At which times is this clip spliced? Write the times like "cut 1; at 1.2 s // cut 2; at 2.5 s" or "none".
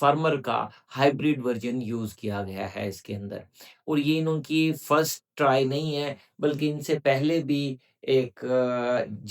none